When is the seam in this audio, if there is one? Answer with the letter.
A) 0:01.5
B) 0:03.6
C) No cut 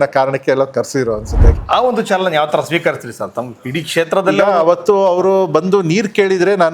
A